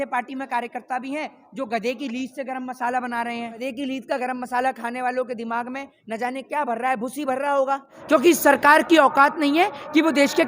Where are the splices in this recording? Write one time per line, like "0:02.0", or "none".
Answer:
0:03.6
0:08.0